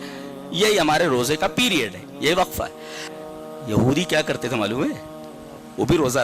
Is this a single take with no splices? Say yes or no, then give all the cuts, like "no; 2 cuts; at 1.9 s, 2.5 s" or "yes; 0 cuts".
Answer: no; 1 cut; at 3.0 s